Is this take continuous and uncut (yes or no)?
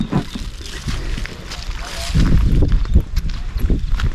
no